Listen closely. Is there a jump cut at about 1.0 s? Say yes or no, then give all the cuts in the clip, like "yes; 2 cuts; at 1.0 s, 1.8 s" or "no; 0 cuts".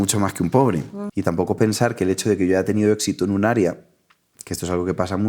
yes; 1 cut; at 1.0 s